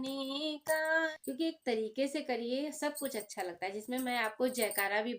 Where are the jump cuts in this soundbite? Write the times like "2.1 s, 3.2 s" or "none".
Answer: 1.1 s